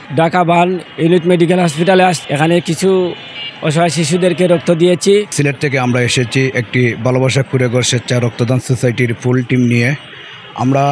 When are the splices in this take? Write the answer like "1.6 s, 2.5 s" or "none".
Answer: 0.9 s, 2.2 s, 5.3 s